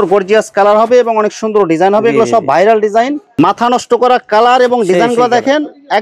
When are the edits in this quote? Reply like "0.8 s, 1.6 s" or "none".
3.3 s